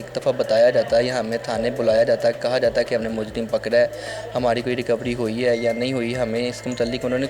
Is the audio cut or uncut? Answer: uncut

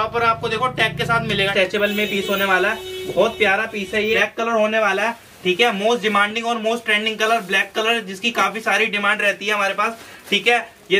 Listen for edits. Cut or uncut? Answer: cut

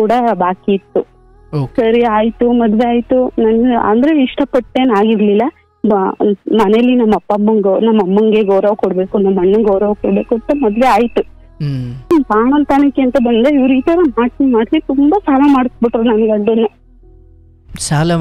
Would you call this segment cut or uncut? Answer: cut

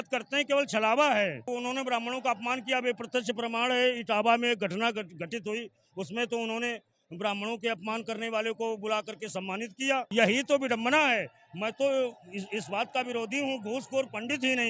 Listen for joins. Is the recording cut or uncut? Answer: cut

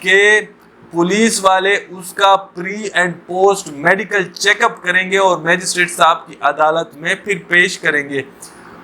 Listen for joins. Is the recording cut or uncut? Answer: uncut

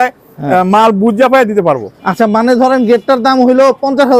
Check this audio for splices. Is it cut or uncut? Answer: uncut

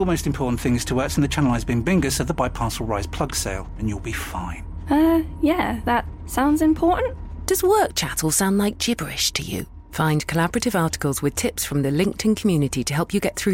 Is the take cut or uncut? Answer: uncut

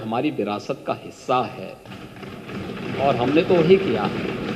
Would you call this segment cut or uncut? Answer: uncut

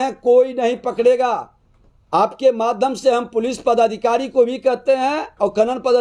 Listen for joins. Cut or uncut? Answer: uncut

